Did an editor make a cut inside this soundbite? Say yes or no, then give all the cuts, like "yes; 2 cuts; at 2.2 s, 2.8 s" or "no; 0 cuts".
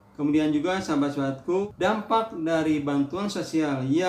yes; 1 cut; at 1.6 s